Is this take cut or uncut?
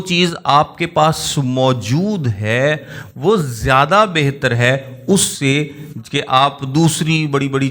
uncut